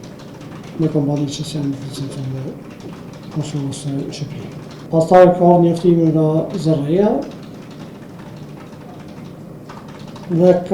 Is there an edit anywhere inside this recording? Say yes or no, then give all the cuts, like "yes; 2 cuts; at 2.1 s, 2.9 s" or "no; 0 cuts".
yes; 1 cut; at 4.8 s